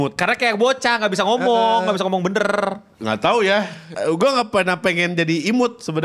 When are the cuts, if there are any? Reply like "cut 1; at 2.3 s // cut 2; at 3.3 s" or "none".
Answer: cut 1; at 2.9 s // cut 2; at 3.9 s